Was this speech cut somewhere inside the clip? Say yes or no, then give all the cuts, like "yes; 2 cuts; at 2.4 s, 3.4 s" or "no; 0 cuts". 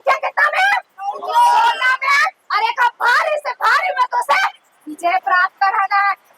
no; 0 cuts